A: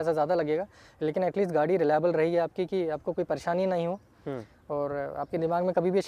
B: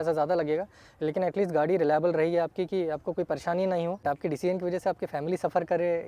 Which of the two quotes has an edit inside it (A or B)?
B